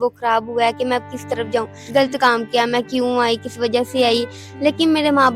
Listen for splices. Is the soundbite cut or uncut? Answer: cut